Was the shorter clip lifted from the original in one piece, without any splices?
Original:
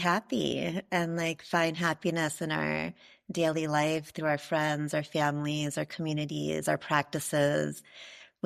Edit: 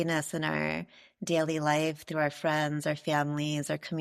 yes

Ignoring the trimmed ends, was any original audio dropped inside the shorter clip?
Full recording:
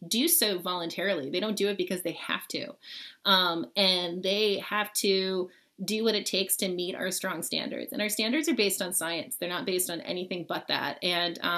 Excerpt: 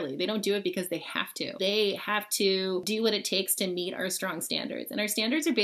yes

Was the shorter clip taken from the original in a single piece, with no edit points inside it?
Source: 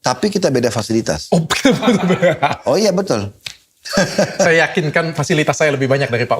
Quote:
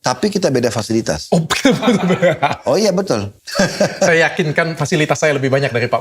no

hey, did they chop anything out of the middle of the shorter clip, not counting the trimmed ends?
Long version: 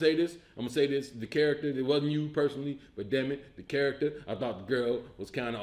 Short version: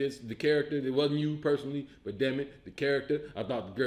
no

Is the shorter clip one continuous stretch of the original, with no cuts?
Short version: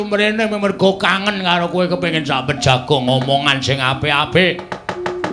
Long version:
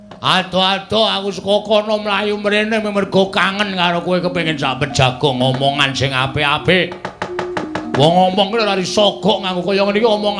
yes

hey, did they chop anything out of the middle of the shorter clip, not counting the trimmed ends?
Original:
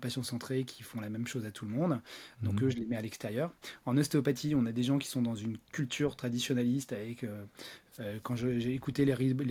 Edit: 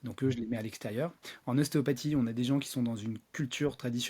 no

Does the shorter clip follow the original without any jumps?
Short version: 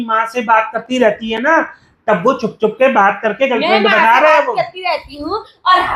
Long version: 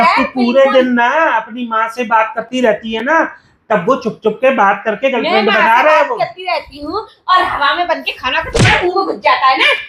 yes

